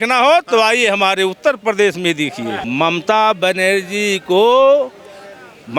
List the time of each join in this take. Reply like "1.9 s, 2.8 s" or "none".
2.6 s